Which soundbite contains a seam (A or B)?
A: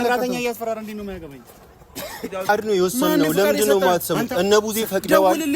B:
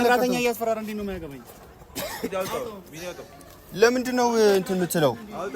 A